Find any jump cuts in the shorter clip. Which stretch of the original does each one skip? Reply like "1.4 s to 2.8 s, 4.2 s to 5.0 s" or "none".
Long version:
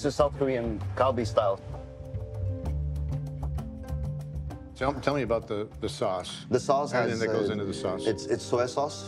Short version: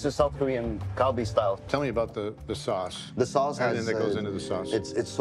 1.6 s to 5.0 s